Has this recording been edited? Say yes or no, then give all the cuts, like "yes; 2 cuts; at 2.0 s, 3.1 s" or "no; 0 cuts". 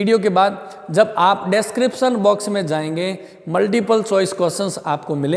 no; 0 cuts